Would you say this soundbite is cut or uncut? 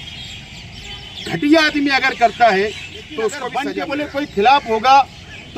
cut